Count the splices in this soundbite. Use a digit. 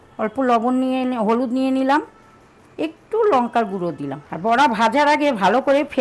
1